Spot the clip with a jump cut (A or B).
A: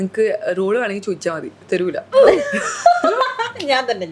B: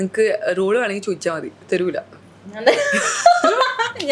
A